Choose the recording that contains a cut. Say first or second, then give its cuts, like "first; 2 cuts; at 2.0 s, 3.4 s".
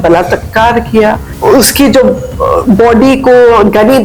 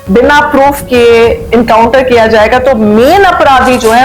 first; 1 cut; at 1.3 s